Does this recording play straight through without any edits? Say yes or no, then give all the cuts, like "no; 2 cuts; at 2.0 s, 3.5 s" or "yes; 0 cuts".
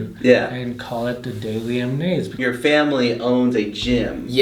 no; 1 cut; at 2.4 s